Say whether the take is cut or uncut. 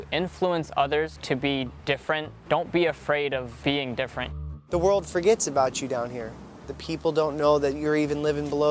cut